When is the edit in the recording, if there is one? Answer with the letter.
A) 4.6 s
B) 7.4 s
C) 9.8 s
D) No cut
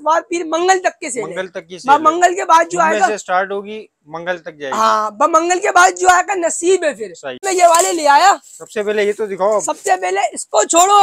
B